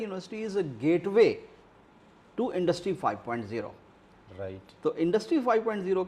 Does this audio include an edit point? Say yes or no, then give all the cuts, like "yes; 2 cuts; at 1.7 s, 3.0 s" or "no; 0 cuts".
no; 0 cuts